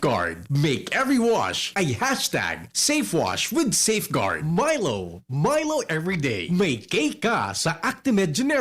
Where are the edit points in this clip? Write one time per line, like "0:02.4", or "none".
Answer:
0:04.4